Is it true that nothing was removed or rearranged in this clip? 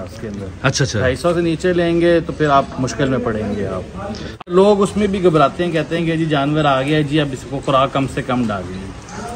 no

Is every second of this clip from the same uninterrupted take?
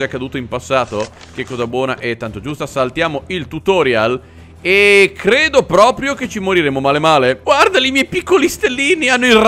yes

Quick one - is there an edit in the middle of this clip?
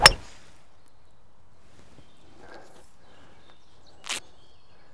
no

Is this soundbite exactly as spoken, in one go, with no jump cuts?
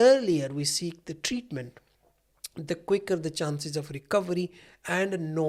yes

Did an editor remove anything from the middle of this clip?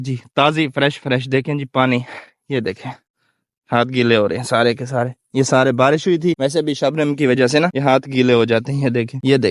no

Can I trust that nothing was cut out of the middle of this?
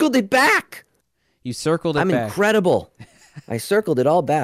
yes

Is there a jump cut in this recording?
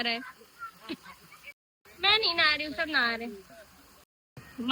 no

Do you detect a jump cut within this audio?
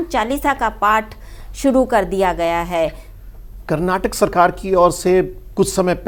no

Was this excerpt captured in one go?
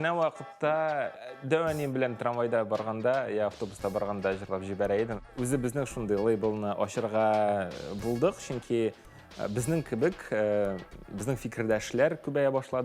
no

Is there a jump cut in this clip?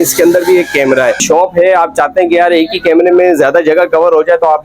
yes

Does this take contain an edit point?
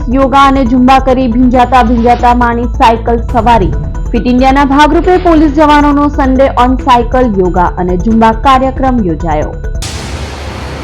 yes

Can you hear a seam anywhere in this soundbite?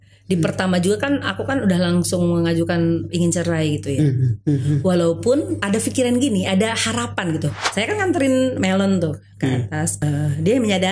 yes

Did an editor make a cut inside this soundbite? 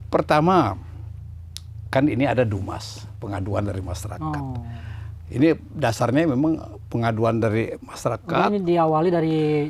no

